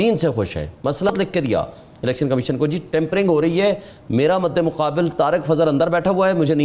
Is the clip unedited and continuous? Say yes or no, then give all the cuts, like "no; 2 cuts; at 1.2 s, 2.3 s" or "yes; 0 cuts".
no; 1 cut; at 1.0 s